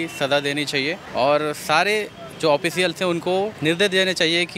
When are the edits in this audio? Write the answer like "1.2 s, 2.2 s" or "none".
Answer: 1.0 s, 3.6 s